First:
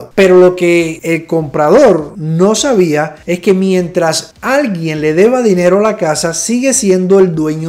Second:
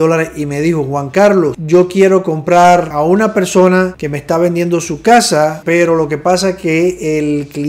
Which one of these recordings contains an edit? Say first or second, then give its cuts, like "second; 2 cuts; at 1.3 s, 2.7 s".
second; 4 cuts; at 1.6 s, 2.9 s, 4.0 s, 5.6 s